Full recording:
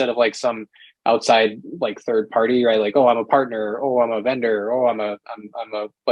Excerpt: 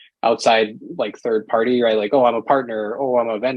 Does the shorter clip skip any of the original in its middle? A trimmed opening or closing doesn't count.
no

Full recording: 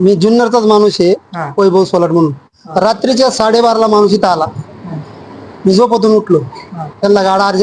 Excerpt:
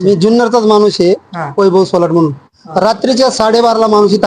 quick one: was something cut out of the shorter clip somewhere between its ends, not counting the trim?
no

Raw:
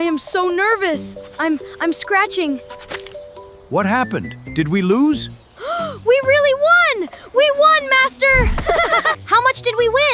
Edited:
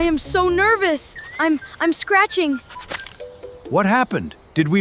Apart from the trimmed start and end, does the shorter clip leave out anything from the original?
no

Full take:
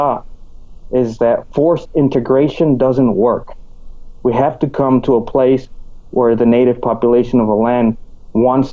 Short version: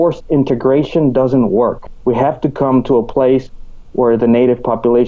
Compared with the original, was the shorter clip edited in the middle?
yes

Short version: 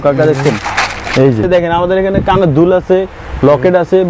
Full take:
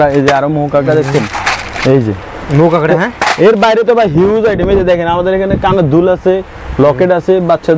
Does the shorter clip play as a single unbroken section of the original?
no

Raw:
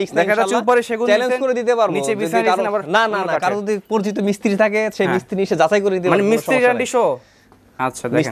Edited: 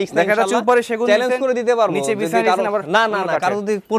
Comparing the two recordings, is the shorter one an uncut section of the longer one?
yes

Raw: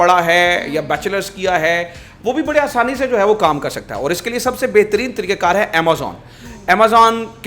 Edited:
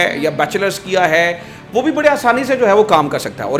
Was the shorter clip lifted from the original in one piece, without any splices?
yes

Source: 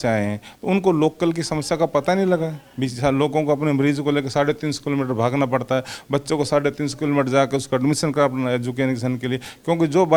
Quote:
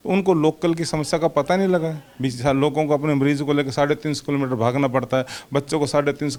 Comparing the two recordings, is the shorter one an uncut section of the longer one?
yes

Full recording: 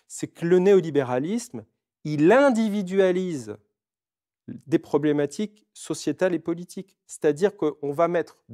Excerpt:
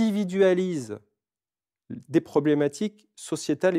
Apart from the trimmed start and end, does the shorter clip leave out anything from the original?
no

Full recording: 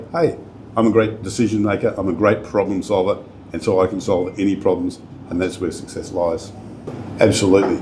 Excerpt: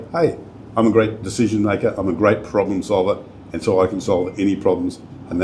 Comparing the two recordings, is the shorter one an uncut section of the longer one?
yes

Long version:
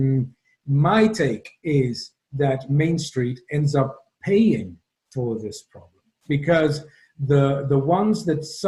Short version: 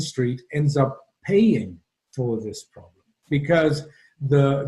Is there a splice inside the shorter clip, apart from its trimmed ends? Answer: no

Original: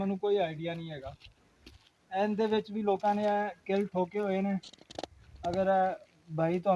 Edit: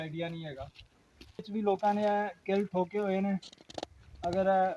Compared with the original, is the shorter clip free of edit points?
no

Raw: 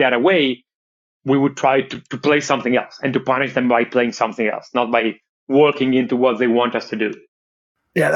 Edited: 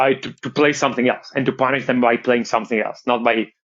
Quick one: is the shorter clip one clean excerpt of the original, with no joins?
yes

